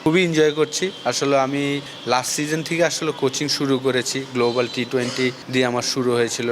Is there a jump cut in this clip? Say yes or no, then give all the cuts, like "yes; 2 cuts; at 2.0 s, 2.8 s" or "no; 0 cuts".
yes; 2 cuts; at 1.9 s, 5.4 s